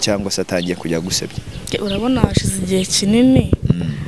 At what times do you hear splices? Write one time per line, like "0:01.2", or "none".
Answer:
none